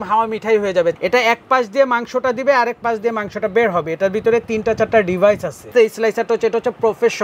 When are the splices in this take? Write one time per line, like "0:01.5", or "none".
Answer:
0:01.0
0:05.7

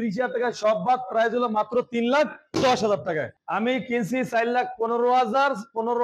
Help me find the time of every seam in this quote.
0:03.4

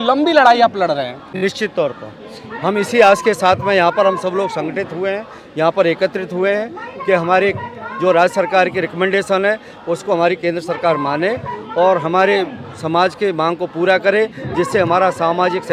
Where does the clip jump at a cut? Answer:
none

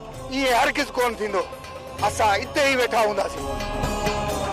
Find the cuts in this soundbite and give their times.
0:03.5

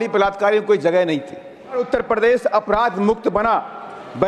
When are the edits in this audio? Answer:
0:01.8

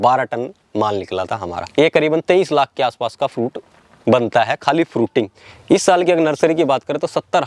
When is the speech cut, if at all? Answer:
0:01.6
0:05.4

